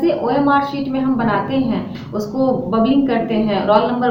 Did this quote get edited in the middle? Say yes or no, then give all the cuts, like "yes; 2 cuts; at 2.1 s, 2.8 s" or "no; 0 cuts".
no; 0 cuts